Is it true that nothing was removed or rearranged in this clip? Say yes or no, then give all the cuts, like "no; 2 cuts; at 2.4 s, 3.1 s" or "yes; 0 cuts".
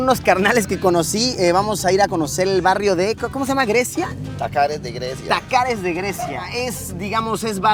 yes; 0 cuts